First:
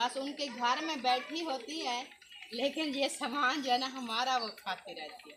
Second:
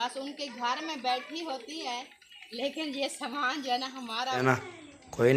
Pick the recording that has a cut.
second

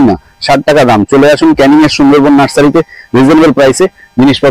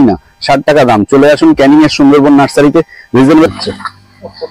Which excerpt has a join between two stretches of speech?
second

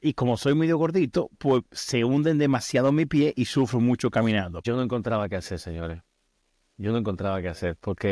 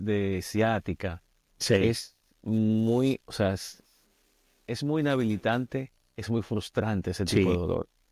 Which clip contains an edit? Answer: first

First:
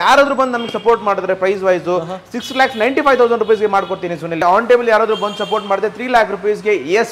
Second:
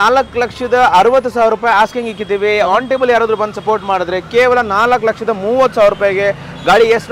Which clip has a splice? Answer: first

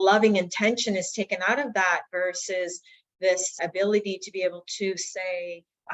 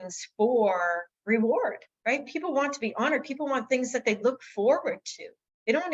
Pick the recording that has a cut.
second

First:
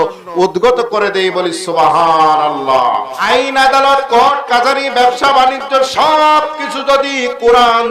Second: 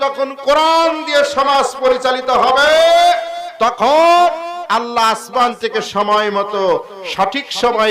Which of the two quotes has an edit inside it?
first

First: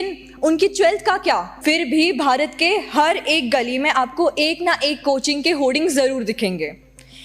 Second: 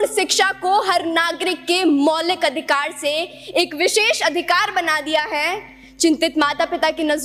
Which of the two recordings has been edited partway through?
first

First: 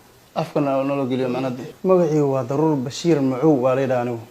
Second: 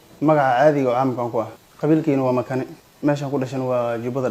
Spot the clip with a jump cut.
first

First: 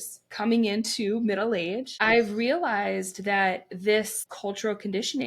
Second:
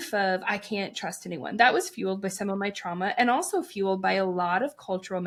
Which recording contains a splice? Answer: first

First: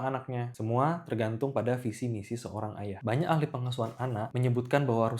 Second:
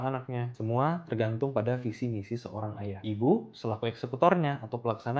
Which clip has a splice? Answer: first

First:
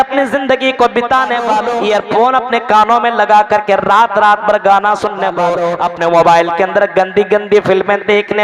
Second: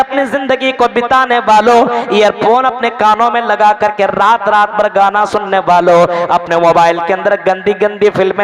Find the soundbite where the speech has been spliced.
first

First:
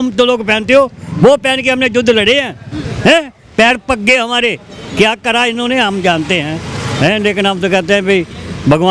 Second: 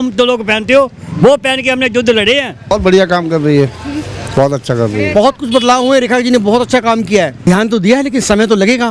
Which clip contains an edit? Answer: second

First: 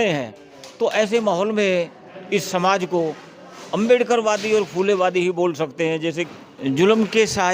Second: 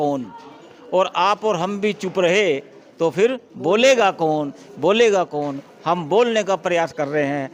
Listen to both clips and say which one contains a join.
first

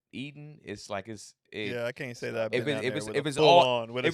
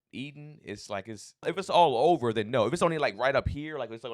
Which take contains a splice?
second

